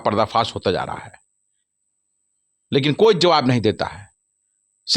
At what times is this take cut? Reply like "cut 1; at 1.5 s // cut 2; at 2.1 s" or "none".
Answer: none